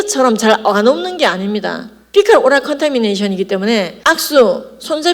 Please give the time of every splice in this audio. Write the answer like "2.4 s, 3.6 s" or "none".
none